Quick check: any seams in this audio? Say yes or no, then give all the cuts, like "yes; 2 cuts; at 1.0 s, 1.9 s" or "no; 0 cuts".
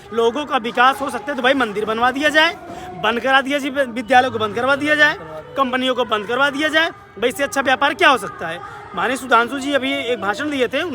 no; 0 cuts